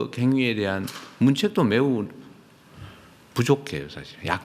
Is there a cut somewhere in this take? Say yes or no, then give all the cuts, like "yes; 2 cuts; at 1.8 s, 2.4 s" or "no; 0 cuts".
no; 0 cuts